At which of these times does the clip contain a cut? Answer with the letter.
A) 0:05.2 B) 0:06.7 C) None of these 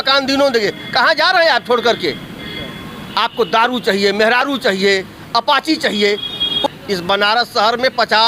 B